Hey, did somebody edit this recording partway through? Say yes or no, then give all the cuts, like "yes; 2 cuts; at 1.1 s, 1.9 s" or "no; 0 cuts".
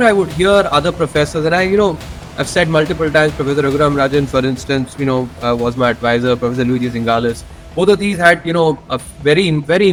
no; 0 cuts